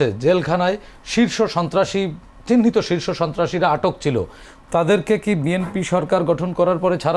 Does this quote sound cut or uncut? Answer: uncut